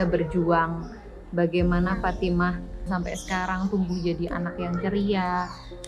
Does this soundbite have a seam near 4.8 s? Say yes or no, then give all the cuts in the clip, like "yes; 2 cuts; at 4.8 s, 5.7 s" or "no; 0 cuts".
no; 1 cut; at 2.9 s